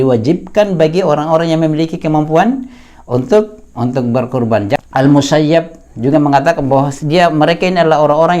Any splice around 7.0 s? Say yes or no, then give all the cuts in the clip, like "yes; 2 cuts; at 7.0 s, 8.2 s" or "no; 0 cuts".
no; 1 cut; at 4.8 s